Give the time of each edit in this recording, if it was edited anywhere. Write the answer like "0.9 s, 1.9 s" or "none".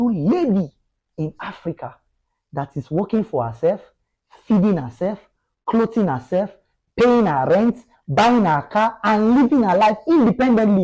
none

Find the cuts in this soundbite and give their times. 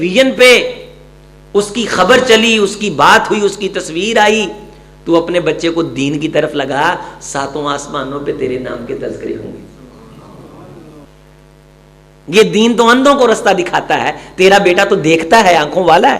11.1 s

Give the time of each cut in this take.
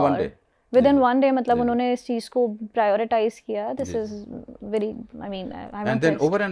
none

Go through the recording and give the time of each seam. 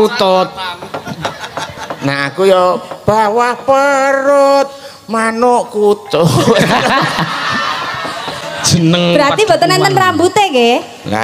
8.4 s

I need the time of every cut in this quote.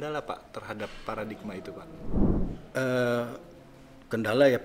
2.1 s

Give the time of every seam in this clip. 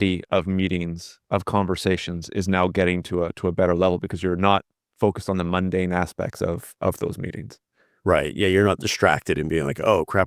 none

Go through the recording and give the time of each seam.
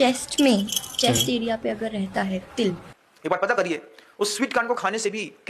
2.9 s

